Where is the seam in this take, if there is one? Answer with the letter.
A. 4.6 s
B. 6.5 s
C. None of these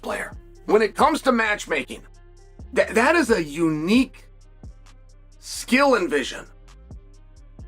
B